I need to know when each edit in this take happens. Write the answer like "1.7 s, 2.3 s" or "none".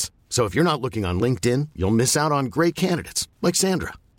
none